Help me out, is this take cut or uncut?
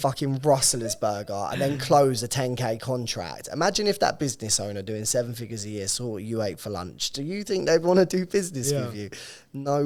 uncut